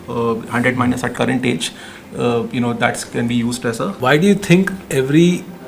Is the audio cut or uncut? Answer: cut